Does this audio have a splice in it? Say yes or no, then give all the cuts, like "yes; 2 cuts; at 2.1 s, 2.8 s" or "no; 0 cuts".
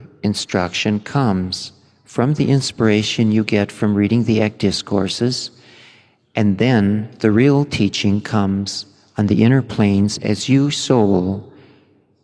no; 0 cuts